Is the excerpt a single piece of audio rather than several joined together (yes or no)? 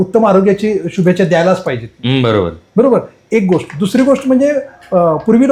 yes